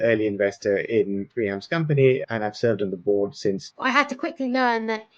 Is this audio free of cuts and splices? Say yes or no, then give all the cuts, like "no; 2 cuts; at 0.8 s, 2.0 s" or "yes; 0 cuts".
no; 2 cuts; at 2.2 s, 3.7 s